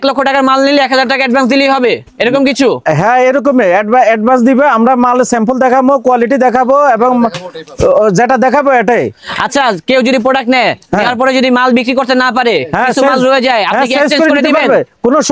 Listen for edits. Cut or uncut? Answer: uncut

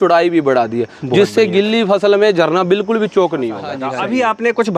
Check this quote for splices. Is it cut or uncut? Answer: cut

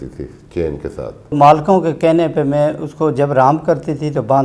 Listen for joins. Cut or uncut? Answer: cut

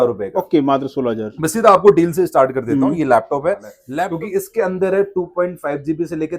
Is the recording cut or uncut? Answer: cut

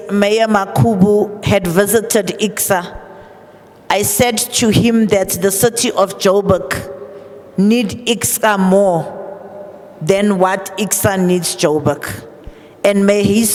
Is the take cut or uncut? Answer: uncut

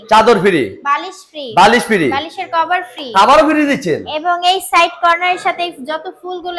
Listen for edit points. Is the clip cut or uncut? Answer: uncut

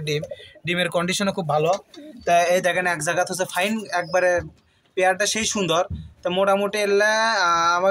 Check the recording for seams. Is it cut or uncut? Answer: uncut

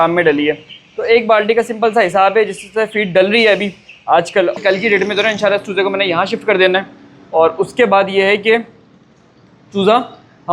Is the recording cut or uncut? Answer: cut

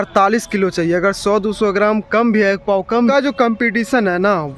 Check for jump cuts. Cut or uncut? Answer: cut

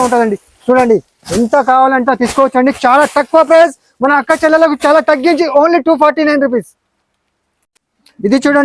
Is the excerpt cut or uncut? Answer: uncut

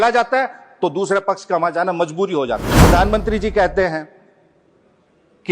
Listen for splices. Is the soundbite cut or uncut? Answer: cut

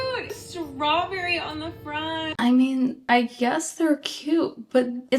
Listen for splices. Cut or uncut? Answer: cut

